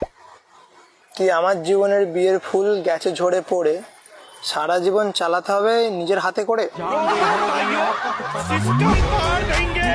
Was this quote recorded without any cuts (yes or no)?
yes